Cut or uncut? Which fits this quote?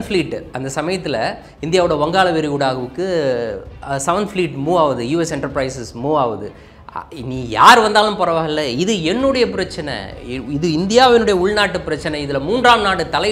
uncut